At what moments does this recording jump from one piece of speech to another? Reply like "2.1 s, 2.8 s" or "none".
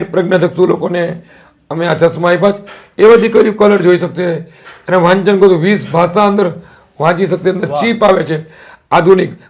none

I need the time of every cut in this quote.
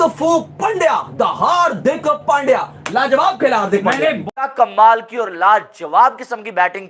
4.2 s

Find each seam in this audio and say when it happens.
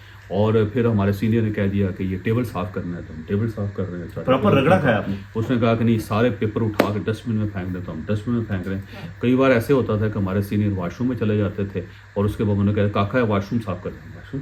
none

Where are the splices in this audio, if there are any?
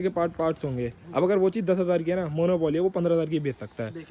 none

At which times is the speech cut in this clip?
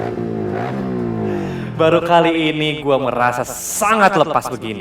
1.6 s

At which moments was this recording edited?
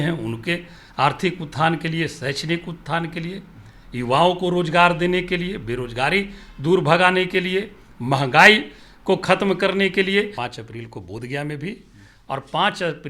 10.5 s

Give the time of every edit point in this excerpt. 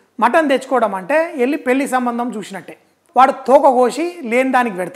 2.9 s

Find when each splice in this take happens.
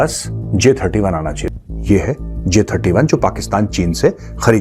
1.4 s

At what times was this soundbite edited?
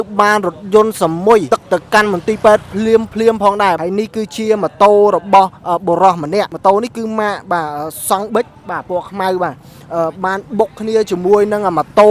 1.5 s, 3.8 s, 6.5 s

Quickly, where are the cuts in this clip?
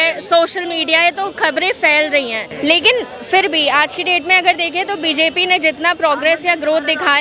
2.4 s

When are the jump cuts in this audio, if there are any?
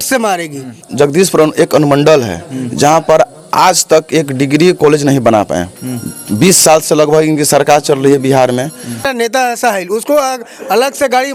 0.9 s, 9.1 s

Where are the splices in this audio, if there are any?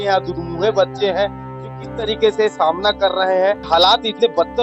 3.6 s

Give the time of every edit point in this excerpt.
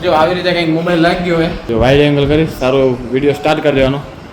1.6 s

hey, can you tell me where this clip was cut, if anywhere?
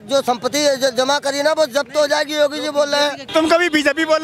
3.3 s

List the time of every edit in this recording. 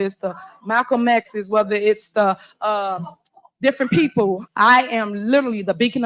4.5 s

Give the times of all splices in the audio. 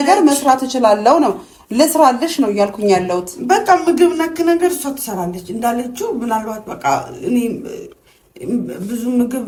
none

